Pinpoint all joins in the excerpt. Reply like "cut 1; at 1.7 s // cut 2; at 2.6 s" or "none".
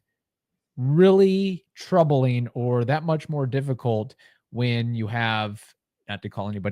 cut 1; at 1.7 s

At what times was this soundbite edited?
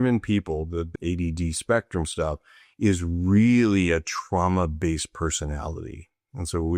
cut 1; at 0.9 s

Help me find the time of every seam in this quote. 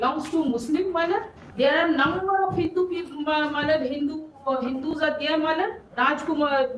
cut 1; at 1.4 s // cut 2; at 5.8 s

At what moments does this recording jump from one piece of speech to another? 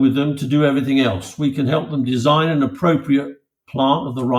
none

